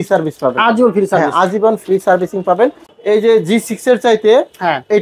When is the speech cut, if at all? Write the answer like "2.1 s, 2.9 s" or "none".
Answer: 2.9 s